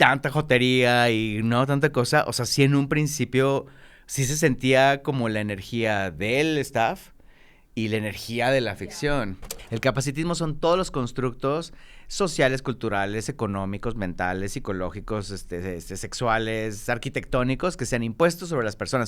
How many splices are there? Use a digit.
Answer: 1